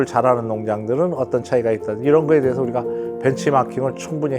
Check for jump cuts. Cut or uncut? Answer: uncut